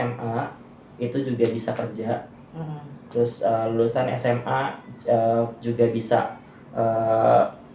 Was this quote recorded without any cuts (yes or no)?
yes